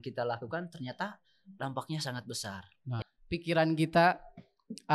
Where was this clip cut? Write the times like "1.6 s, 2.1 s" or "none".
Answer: 3.0 s

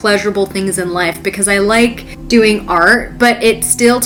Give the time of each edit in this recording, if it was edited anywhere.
none

